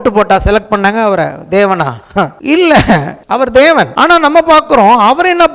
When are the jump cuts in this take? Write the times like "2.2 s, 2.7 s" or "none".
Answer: 2.4 s, 3.2 s, 3.9 s